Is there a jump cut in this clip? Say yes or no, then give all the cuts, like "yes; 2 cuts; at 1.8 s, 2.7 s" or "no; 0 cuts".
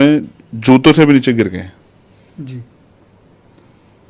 no; 0 cuts